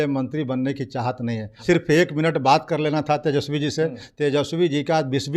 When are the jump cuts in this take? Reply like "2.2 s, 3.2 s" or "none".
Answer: 1.5 s